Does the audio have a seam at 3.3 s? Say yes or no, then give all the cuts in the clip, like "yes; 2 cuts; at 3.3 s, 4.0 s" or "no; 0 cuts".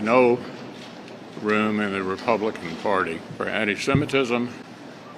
yes; 1 cut; at 3.3 s